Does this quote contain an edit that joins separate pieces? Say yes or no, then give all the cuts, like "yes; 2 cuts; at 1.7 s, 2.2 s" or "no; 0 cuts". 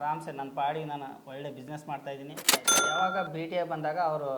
yes; 1 cut; at 2.8 s